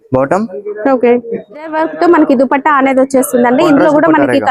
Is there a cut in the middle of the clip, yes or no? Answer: yes